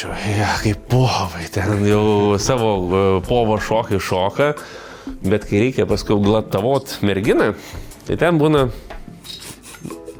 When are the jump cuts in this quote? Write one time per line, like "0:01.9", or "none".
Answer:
none